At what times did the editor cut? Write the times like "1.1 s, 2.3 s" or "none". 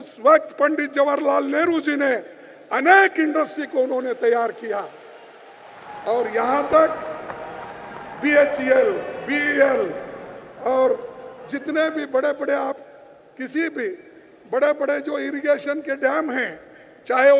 none

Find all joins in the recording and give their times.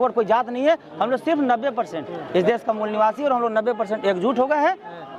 none

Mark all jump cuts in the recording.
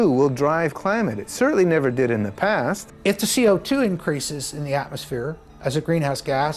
2.9 s

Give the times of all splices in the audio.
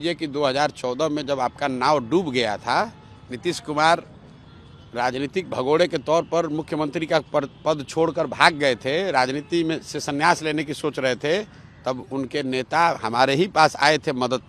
none

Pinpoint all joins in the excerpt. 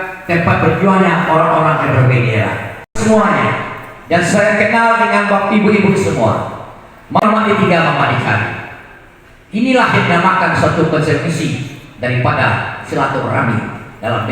7.2 s

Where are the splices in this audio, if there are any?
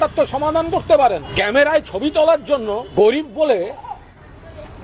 1.3 s, 2.9 s

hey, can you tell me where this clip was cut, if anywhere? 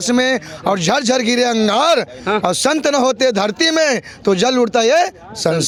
none

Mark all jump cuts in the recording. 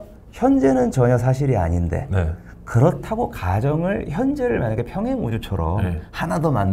none

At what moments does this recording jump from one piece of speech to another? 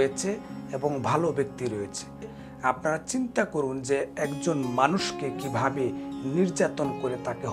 2.4 s

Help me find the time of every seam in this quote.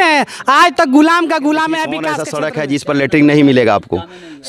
2.3 s

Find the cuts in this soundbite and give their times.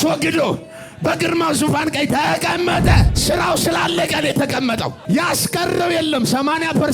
3.1 s, 5.0 s

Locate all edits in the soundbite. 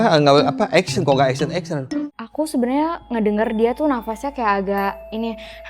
2.2 s

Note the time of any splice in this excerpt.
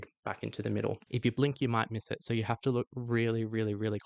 1.0 s

